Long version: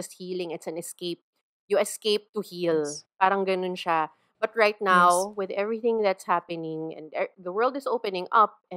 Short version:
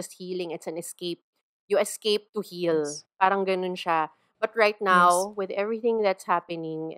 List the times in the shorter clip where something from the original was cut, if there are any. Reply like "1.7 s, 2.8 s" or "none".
none